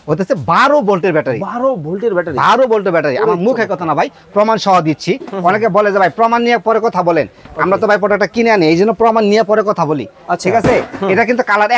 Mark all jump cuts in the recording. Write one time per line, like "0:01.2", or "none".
none